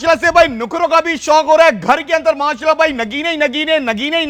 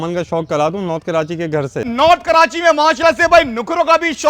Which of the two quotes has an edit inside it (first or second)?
second